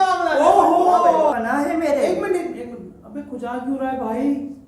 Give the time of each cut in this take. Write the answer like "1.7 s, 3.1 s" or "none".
1.3 s